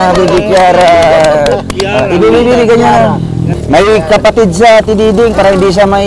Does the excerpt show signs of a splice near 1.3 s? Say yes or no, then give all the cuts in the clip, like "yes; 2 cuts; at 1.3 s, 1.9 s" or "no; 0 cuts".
no; 1 cut; at 3.4 s